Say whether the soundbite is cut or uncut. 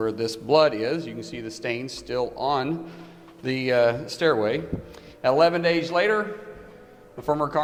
uncut